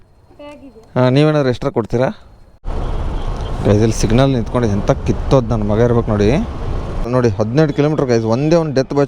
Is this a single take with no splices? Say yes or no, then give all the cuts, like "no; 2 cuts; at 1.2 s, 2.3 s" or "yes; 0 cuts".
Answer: no; 2 cuts; at 2.6 s, 7.0 s